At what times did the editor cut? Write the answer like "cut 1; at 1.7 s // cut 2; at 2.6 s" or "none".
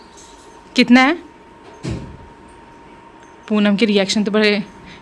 none